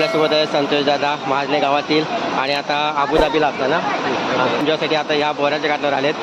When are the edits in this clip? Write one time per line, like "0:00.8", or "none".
0:04.6